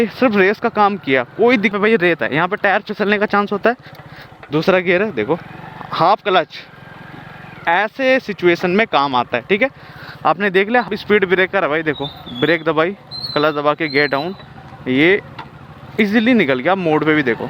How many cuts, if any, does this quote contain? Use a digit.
2